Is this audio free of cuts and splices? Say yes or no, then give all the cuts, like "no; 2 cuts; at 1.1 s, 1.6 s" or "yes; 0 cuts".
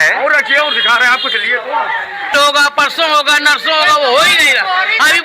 no; 1 cut; at 2.3 s